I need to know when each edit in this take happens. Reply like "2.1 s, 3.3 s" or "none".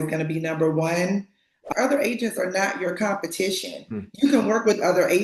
1.4 s